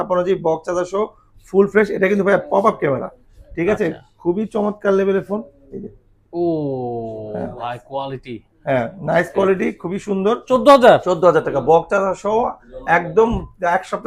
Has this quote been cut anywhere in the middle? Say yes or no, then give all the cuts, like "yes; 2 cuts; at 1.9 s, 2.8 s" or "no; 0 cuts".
yes; 1 cut; at 10.4 s